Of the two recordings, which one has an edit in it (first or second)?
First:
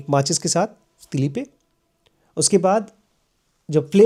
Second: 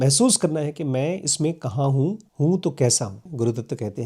second